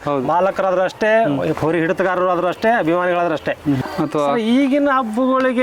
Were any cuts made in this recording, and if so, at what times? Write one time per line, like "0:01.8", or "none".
0:03.8